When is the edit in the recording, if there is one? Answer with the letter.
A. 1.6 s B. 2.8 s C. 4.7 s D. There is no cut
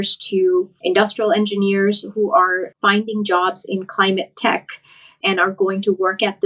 D